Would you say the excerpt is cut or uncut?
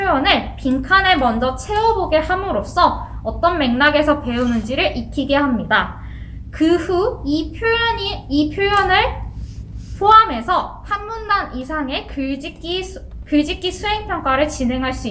uncut